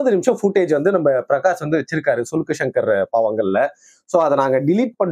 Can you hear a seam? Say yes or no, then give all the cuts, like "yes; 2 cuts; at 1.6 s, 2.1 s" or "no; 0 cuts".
no; 0 cuts